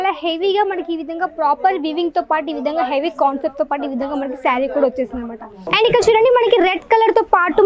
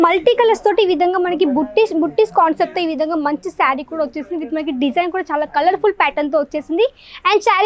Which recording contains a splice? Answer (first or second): first